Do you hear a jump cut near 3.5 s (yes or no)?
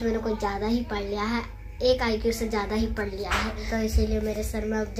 yes